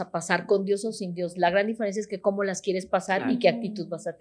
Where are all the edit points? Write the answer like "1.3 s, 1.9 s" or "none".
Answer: none